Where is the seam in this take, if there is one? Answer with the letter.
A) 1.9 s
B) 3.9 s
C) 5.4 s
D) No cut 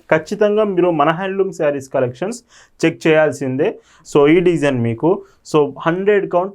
B